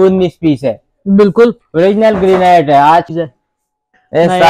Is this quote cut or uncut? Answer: cut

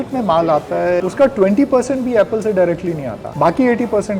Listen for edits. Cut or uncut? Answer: cut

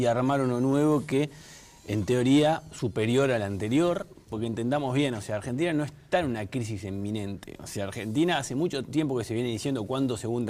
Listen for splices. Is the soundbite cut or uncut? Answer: uncut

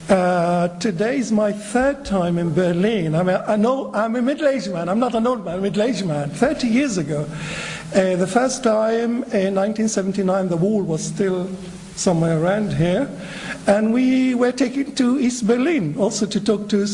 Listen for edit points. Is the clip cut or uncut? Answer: cut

